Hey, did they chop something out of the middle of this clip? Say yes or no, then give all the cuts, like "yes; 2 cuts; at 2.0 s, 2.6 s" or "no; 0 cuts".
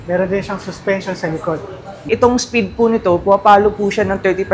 yes; 1 cut; at 2.0 s